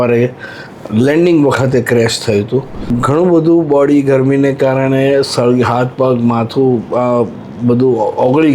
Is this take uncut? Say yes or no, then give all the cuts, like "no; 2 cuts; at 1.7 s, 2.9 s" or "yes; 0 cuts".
no; 1 cut; at 2.8 s